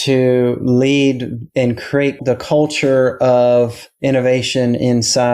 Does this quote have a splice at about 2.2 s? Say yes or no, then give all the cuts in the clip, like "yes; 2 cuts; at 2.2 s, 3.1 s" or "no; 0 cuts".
yes; 1 cut; at 2.2 s